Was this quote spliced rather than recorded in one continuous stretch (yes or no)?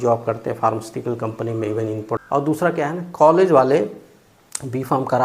yes